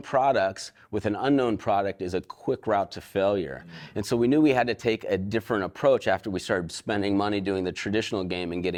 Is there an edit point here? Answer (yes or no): no